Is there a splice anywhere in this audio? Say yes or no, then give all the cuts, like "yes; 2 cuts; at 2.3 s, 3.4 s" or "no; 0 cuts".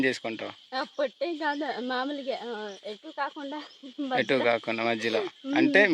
no; 0 cuts